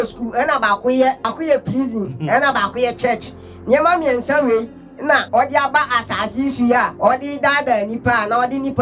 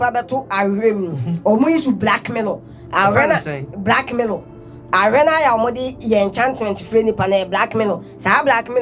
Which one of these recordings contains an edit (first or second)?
first